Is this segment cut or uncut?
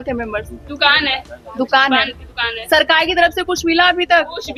uncut